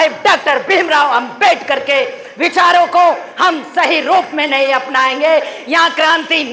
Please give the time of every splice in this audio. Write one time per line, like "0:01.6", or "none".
none